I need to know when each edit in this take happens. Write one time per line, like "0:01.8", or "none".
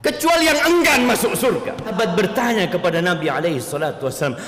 0:01.9